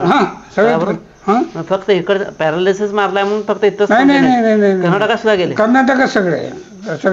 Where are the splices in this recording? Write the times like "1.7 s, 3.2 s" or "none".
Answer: none